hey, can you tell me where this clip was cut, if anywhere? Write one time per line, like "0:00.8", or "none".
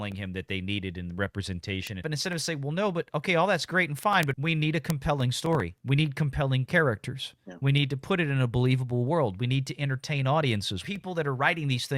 0:02.0
0:04.4
0:05.8
0:10.8

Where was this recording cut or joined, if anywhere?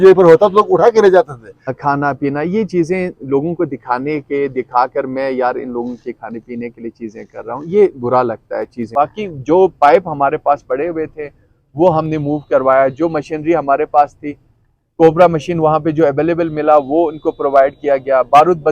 0:01.7
0:08.9

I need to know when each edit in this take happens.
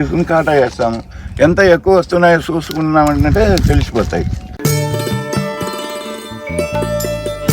0:04.5

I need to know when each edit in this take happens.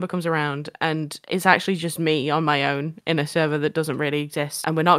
none

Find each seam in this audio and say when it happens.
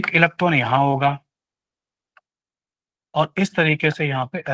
none

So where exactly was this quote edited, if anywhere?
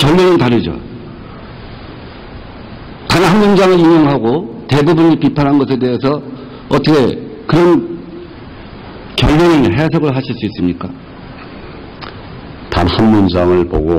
0:02.9

